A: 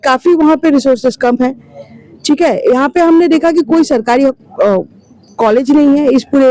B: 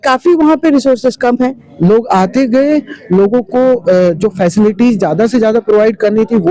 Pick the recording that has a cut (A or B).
B